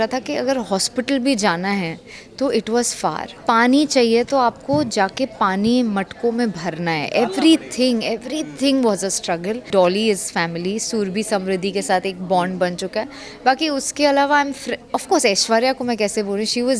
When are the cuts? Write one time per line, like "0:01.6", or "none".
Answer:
0:03.3
0:09.7

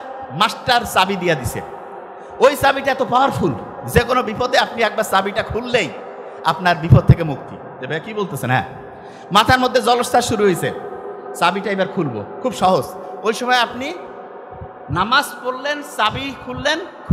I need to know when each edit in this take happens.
0:13.0

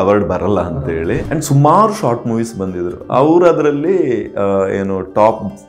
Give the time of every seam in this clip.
0:01.2

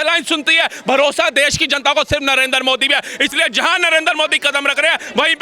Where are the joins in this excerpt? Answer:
none

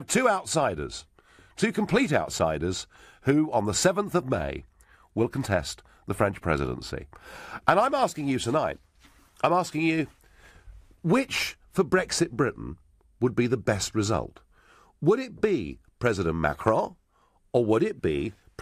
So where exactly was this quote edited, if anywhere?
none

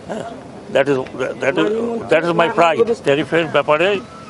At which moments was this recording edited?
0:03.0

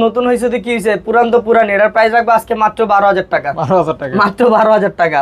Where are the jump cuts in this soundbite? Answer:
none

